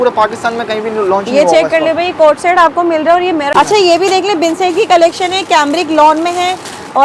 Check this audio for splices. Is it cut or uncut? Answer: cut